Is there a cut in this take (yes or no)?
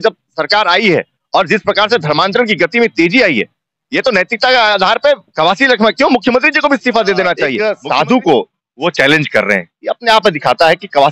yes